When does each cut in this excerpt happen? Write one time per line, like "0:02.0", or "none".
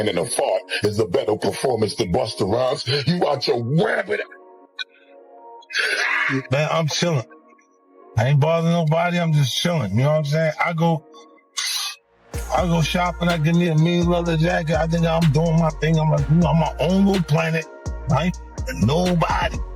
0:06.5